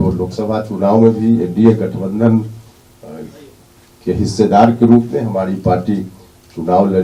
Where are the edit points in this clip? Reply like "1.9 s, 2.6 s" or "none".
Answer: none